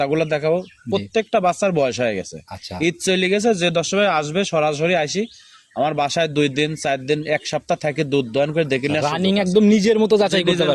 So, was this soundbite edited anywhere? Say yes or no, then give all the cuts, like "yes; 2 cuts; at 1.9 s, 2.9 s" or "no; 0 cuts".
no; 0 cuts